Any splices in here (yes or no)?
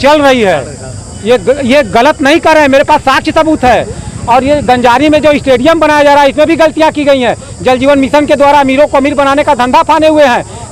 no